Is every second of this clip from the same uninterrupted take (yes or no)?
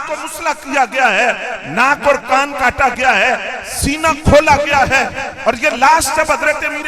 yes